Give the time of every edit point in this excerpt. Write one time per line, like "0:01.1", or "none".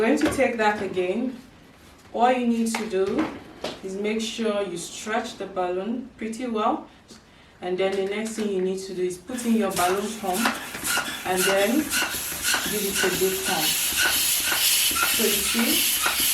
0:07.1